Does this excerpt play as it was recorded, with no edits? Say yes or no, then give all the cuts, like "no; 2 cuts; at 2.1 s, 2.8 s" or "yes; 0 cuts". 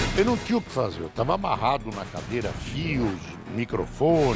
yes; 0 cuts